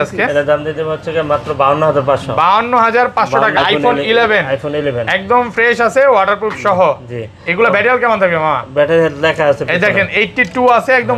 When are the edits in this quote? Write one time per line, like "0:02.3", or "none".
0:03.6